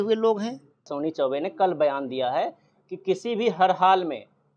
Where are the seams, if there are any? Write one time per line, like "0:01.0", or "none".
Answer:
0:00.9